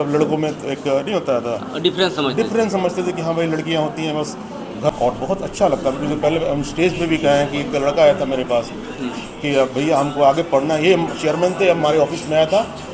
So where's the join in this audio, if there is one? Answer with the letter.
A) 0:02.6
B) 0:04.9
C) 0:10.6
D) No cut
B